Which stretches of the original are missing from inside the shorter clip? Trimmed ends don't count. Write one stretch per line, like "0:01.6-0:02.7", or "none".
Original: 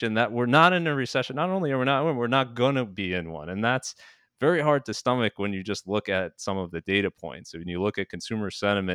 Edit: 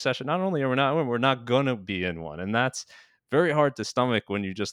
none